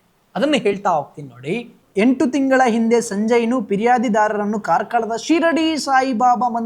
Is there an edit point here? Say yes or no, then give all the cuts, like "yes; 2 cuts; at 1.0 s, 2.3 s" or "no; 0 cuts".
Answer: yes; 1 cut; at 1.8 s